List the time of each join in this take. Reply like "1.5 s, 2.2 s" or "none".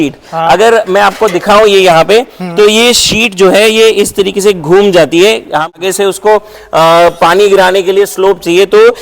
5.8 s